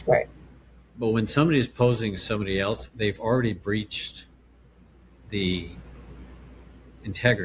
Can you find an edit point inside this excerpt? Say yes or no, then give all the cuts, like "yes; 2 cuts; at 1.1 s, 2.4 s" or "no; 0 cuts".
no; 0 cuts